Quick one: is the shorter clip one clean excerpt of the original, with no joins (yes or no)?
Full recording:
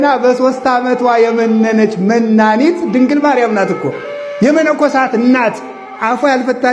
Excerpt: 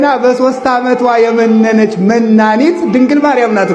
yes